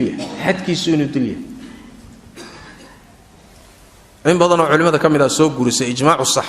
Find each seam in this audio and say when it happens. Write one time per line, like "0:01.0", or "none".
0:03.0